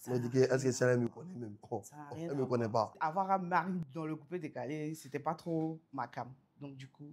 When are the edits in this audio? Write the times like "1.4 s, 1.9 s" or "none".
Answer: 3.0 s